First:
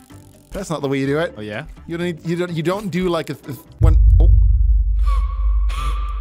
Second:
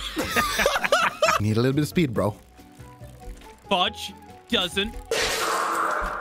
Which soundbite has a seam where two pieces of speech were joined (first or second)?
second